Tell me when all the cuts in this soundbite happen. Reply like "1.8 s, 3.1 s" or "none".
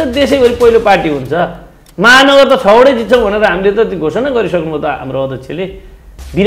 none